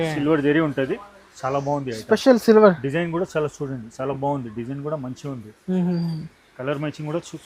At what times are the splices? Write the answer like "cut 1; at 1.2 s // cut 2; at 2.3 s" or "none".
none